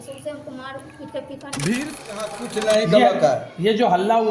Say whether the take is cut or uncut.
cut